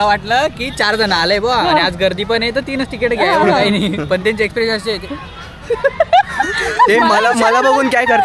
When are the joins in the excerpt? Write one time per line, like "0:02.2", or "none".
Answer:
none